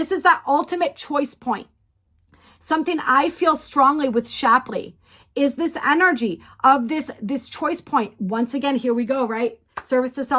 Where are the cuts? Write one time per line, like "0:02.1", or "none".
none

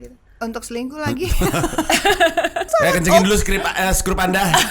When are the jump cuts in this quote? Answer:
0:02.7

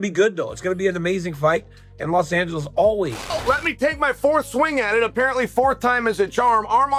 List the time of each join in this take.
0:03.2

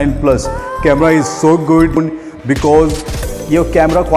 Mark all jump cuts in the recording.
0:02.0

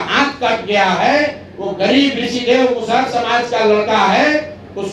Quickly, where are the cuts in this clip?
none

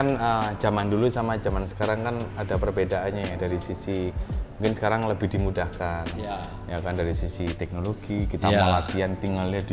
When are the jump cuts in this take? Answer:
none

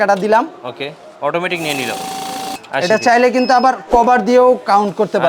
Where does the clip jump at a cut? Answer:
0:02.6

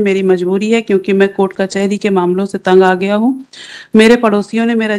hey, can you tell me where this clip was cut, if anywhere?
none

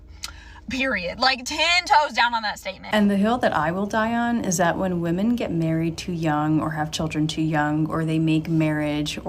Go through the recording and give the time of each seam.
0:02.8

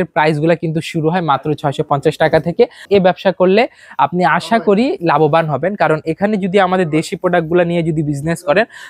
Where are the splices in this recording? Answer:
0:02.8

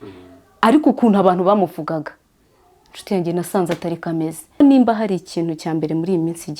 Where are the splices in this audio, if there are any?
0:04.6

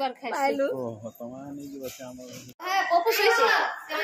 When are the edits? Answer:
0:02.6

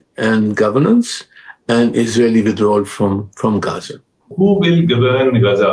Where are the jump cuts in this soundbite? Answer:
0:04.3

